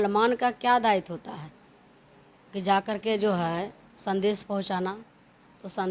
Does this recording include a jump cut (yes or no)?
no